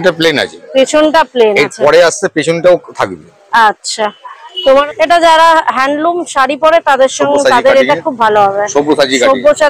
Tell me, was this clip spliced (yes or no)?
yes